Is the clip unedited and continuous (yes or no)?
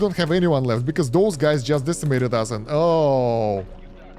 yes